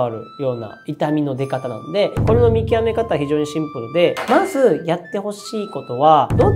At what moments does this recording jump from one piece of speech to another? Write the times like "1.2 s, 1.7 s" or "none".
2.2 s, 4.2 s